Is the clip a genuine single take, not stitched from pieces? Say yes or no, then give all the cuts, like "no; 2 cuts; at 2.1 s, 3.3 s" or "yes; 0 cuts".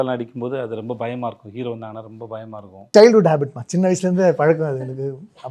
no; 1 cut; at 2.9 s